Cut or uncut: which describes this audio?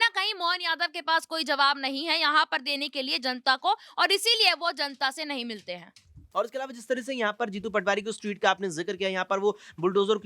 cut